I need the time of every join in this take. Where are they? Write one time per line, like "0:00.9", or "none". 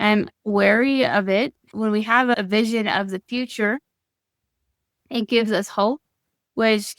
0:01.7